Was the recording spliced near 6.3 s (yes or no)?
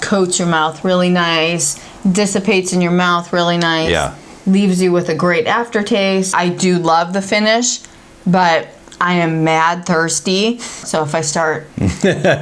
yes